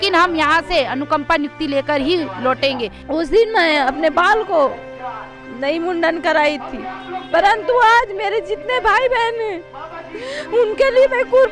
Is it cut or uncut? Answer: cut